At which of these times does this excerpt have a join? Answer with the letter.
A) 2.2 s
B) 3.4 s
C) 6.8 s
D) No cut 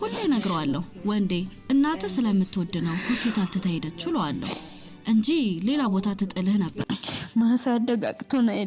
C